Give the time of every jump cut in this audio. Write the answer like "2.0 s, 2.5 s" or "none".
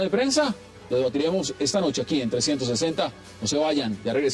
2.0 s